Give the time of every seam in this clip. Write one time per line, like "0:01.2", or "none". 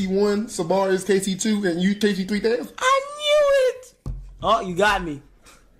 none